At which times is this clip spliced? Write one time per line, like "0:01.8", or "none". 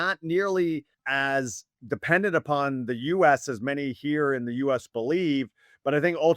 0:01.0

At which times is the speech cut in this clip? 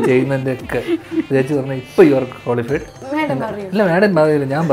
0:03.0

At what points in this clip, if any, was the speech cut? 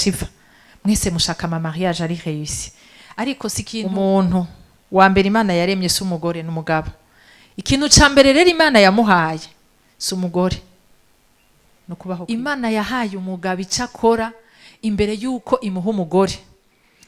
0:03.8
0:12.2

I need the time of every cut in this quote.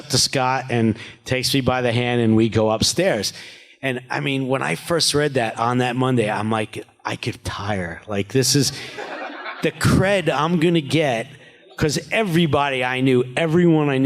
0:07.4

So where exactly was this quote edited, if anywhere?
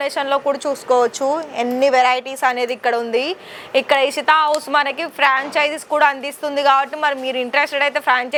none

